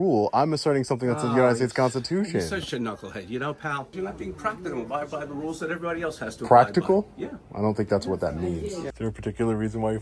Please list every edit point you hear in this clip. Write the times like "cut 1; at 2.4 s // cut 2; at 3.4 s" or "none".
cut 1; at 3.9 s // cut 2; at 8.9 s